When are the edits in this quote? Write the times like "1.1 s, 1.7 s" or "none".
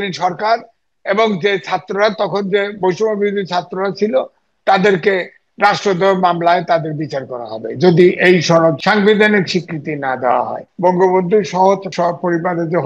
8.8 s, 10.6 s, 11.9 s